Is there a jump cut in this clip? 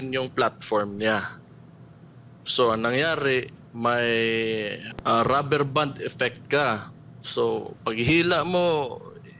yes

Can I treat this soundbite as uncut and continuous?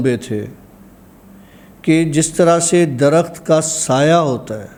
yes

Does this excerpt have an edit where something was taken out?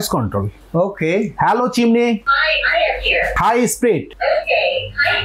yes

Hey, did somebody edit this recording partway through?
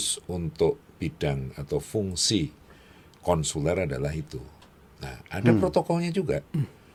no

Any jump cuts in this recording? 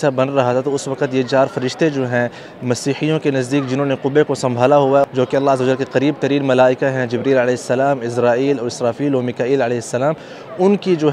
yes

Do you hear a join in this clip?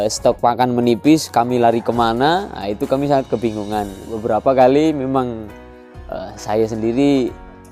yes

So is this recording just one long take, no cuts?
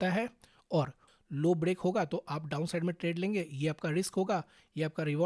no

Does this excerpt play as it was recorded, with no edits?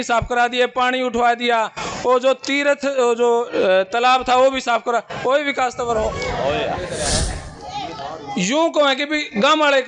no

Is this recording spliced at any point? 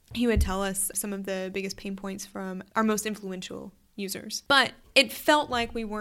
yes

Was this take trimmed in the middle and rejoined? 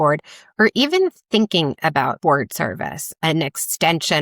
yes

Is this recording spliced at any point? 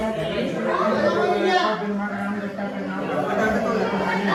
no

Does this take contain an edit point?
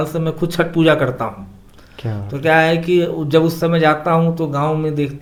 no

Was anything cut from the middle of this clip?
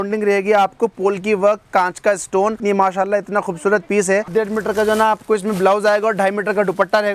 yes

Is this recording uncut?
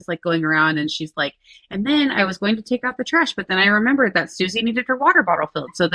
yes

